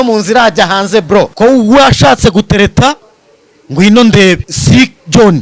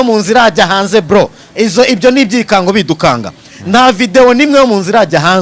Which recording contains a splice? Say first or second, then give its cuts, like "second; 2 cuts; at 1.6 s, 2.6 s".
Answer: first; 2 cuts; at 1.3 s, 4.5 s